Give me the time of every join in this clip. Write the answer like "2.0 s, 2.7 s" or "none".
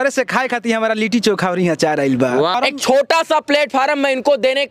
2.6 s